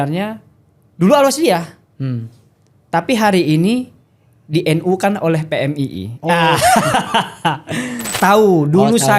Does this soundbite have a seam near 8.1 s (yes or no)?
yes